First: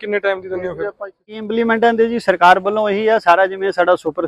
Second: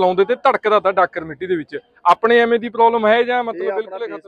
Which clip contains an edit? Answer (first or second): first